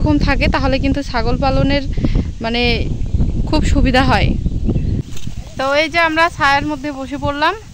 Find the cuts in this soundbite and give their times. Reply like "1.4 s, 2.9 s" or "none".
5.1 s